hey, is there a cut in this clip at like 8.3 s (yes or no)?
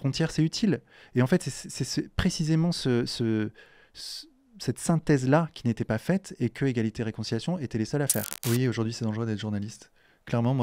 yes